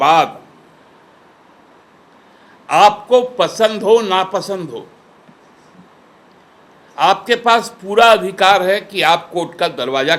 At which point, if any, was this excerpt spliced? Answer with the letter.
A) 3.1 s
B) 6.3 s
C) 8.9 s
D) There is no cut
D